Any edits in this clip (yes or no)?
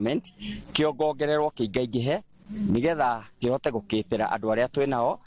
no